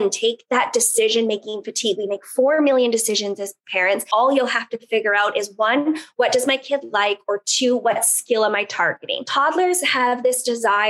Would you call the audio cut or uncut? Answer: cut